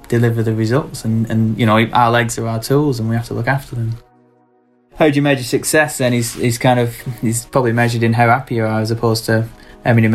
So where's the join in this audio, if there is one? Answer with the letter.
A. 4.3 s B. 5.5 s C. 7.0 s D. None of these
A